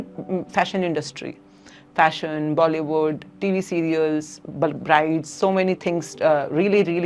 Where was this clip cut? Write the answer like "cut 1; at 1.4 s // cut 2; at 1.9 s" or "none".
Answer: none